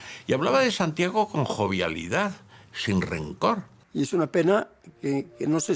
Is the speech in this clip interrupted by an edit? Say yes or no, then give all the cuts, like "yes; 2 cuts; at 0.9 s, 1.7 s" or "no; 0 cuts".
yes; 1 cut; at 3.8 s